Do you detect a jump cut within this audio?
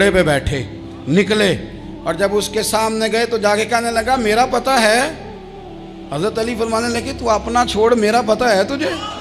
no; 0 cuts

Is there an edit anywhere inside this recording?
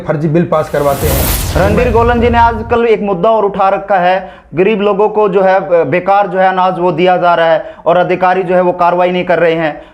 yes; 1 cut; at 1.4 s

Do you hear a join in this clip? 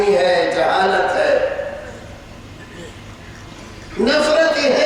no; 0 cuts

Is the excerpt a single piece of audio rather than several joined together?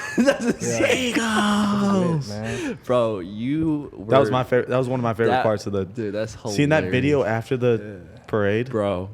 yes; 0 cuts

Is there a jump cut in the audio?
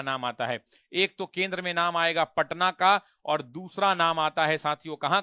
no; 0 cuts

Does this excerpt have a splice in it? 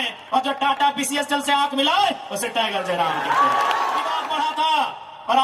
yes; 1 cut; at 4.2 s

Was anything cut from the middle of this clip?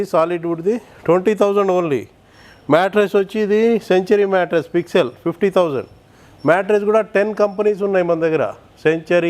no; 0 cuts

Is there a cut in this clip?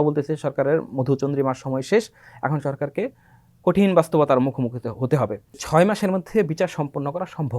yes; 1 cut; at 5.6 s

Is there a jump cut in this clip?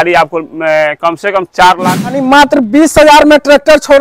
yes; 1 cut; at 2.1 s

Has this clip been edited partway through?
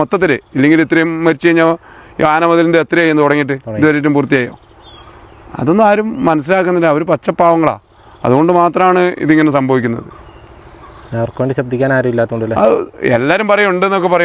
no; 0 cuts

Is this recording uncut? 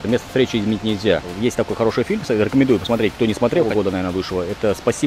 no; 2 cuts; at 1.3 s, 3.7 s

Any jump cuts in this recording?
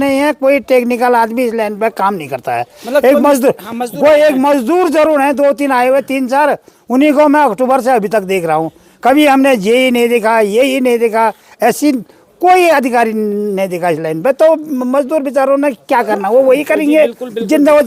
no; 0 cuts

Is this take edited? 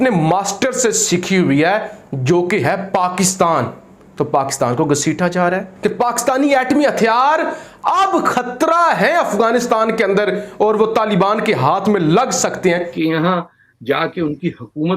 yes; 2 cuts; at 5.7 s, 12.9 s

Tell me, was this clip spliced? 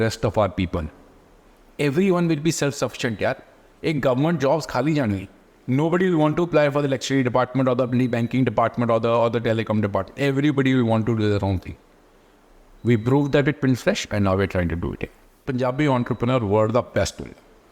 yes; 1 cut; at 15.5 s

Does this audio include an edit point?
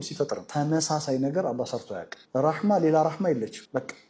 no; 0 cuts

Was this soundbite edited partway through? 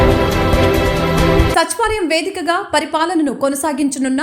yes; 1 cut; at 1.5 s

